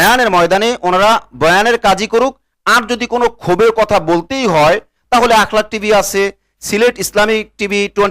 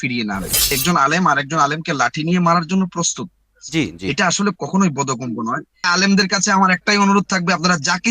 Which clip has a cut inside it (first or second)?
second